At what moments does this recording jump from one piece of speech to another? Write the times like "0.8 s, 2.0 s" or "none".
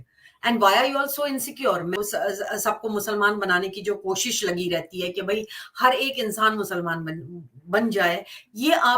2.0 s